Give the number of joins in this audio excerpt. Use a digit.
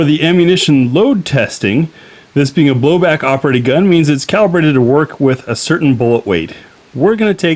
0